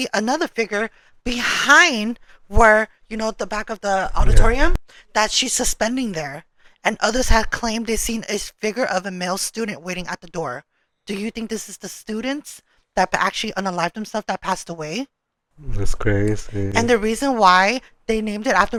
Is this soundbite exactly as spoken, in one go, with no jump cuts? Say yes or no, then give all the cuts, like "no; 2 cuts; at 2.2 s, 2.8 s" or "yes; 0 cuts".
yes; 0 cuts